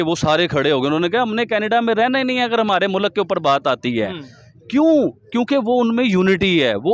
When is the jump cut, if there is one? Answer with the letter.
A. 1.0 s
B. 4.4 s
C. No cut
C